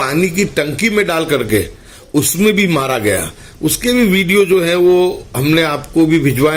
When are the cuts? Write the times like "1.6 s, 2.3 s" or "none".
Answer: none